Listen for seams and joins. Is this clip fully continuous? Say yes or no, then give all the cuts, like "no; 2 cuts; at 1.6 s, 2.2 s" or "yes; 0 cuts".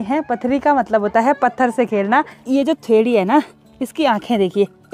no; 1 cut; at 2.4 s